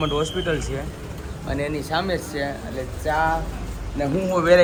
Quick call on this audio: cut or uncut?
uncut